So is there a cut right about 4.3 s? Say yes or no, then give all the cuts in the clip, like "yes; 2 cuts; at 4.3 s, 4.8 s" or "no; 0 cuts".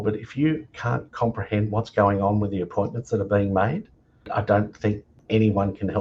yes; 2 cuts; at 4.3 s, 5.2 s